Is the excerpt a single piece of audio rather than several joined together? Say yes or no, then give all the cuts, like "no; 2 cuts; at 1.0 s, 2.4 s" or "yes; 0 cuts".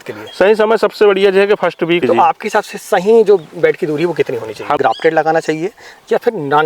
no; 2 cuts; at 2.0 s, 4.8 s